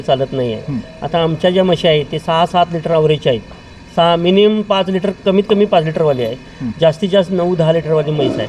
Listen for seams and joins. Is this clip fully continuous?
yes; 0 cuts

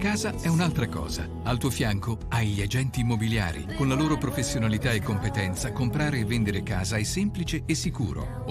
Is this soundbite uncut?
no; 1 cut; at 1.3 s

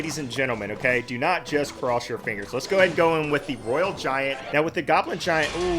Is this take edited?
yes; 1 cut; at 4.4 s

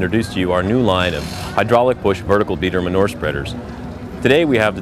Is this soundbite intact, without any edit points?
yes; 0 cuts

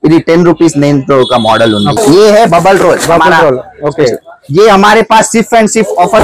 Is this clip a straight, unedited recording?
no; 1 cut; at 1.9 s

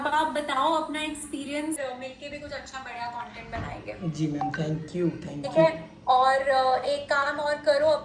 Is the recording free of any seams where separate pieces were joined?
no; 1 cut; at 1.8 s

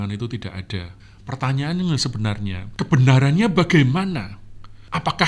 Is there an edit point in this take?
yes; 2 cuts; at 0.9 s, 2.6 s

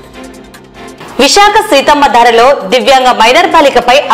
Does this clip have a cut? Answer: yes; 1 cut; at 0.9 s

